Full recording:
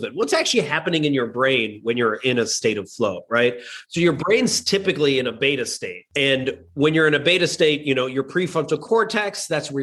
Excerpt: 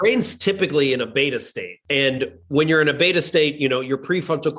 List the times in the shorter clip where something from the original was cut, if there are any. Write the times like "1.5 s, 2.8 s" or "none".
none